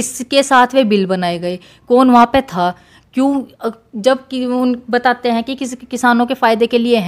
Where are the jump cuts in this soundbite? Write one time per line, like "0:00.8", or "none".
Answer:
none